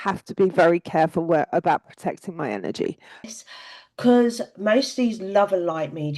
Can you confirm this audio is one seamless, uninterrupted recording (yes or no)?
no